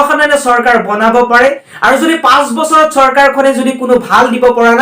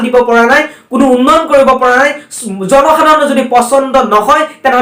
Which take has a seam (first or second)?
first